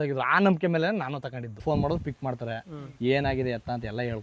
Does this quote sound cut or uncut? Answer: cut